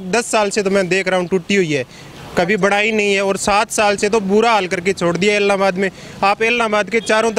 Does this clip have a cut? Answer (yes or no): no